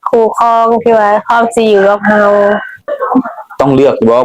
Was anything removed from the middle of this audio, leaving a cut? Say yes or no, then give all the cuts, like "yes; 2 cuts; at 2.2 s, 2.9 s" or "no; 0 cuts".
yes; 1 cut; at 2.9 s